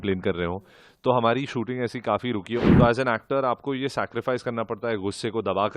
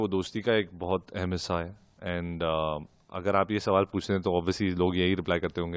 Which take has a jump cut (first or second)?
first